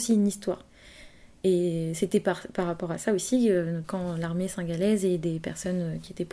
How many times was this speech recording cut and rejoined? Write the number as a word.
one